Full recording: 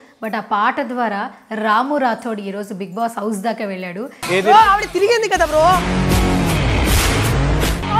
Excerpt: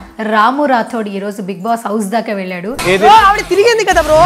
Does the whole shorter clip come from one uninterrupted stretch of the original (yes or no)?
no